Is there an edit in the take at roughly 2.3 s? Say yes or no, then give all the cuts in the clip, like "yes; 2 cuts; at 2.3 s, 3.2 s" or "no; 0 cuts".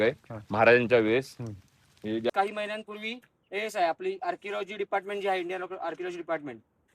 yes; 1 cut; at 2.3 s